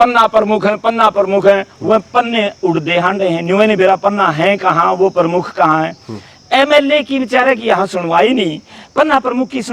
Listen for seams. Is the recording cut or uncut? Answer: uncut